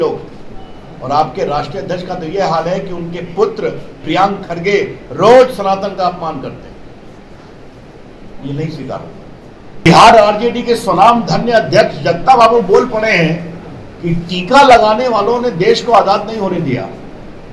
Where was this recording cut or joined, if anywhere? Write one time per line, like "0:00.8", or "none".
0:09.9